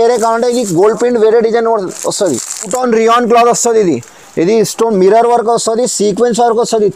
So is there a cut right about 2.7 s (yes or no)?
yes